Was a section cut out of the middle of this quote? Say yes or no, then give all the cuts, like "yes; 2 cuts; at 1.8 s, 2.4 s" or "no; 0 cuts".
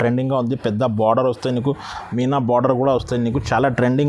no; 0 cuts